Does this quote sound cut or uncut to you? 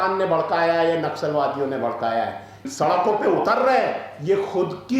cut